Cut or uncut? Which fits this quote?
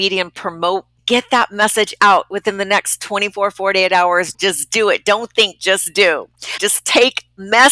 cut